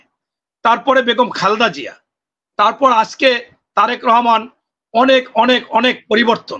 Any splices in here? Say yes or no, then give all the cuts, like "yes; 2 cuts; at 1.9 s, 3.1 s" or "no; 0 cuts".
no; 0 cuts